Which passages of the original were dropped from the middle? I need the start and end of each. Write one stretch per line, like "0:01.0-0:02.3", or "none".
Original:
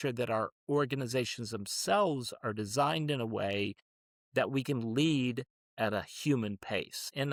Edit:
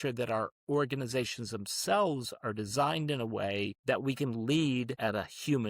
0:03.8-0:04.2
0:05.4-0:05.7